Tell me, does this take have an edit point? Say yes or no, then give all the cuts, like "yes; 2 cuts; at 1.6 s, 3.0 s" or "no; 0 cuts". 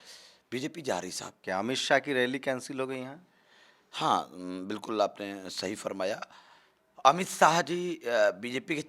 yes; 1 cut; at 1.4 s